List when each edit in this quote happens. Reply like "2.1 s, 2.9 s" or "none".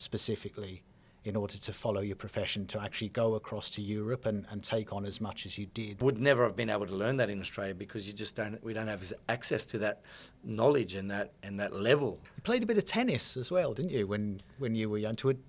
6.0 s, 12.3 s